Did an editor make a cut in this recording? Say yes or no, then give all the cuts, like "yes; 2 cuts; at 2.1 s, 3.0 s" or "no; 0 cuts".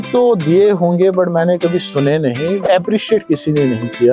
yes; 1 cut; at 2.6 s